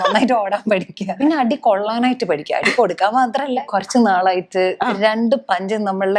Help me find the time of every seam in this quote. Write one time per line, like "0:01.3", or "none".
0:01.1
0:03.7